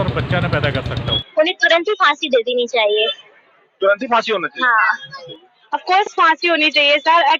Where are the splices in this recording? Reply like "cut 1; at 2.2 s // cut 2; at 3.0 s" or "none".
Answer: cut 1; at 1.1 s // cut 2; at 5.3 s